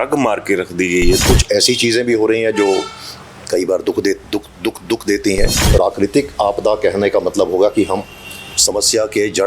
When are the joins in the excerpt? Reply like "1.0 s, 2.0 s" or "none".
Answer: 1.2 s, 5.6 s